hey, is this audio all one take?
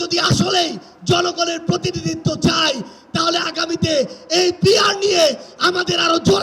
yes; 0 cuts

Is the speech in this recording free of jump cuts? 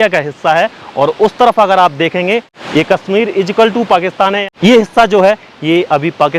no; 2 cuts; at 2.5 s, 4.4 s

